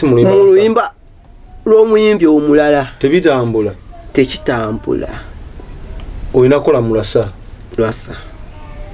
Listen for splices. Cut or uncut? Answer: uncut